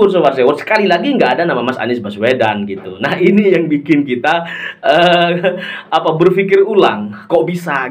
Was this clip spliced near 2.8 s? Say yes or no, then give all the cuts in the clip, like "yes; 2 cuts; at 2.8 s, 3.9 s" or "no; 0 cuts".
no; 0 cuts